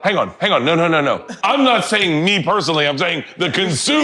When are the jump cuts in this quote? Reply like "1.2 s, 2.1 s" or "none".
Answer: 1.3 s